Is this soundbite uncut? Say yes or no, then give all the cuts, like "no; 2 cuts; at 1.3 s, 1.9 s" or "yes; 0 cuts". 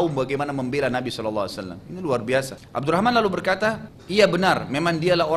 no; 2 cuts; at 2.6 s, 3.9 s